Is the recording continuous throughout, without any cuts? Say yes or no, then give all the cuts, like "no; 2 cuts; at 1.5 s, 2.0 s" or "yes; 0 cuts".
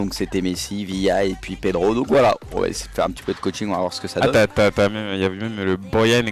no; 1 cut; at 2.8 s